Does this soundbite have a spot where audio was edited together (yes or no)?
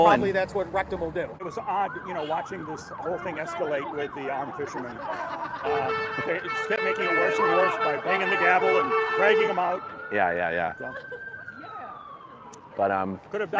no